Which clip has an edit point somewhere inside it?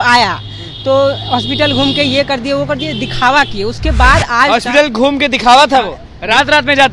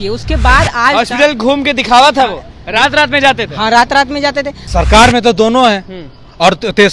second; 1 cut; at 4.6 s

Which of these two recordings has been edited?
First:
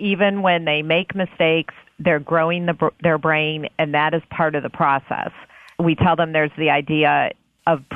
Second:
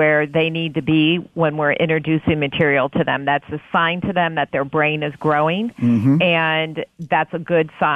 first; 1 cut; at 5.7 s

